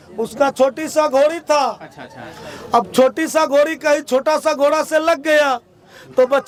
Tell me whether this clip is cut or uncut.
uncut